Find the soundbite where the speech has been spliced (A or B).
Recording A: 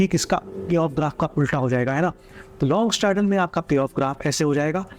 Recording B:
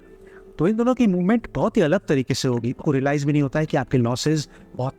B